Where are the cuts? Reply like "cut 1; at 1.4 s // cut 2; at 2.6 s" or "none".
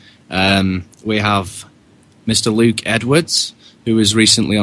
cut 1; at 2.5 s